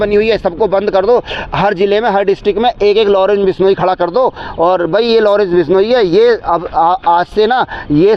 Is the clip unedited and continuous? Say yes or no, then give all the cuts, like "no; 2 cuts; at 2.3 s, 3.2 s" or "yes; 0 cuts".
yes; 0 cuts